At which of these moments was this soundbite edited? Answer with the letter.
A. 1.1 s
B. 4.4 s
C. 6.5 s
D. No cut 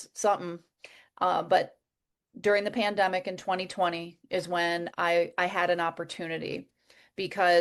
D